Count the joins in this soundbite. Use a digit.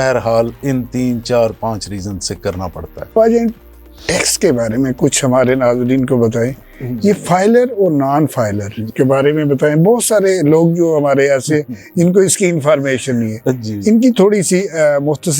1